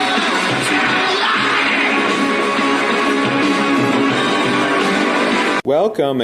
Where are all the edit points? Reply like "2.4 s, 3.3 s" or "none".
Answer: 1.0 s